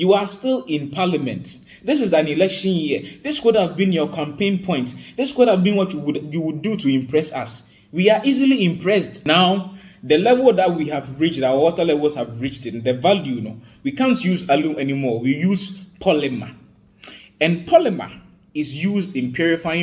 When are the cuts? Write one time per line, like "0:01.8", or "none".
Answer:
0:09.1